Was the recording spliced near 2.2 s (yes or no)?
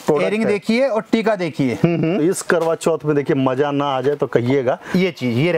yes